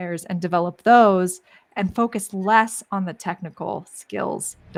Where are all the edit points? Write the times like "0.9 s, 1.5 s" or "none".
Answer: none